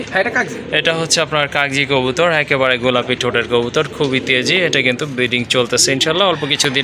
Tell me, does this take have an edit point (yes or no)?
no